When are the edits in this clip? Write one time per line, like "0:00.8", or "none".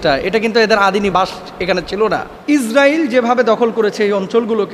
0:02.3